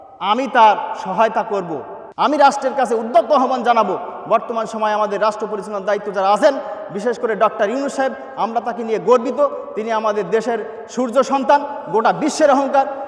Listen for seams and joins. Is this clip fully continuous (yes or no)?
no